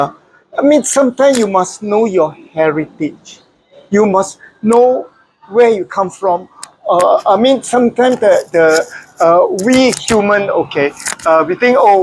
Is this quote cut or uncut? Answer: uncut